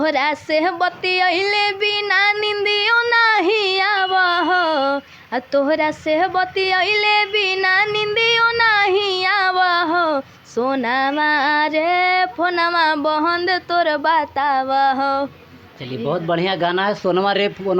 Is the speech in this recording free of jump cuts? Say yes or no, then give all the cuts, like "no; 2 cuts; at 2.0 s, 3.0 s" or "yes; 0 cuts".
yes; 0 cuts